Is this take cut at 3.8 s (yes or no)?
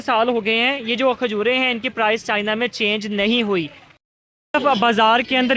yes